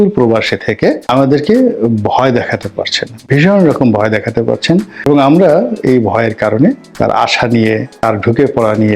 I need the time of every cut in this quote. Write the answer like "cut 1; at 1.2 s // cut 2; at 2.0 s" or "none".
cut 1; at 1.0 s // cut 2; at 5.1 s // cut 3; at 6.9 s // cut 4; at 8.0 s

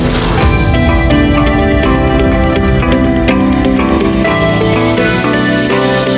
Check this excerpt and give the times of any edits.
none

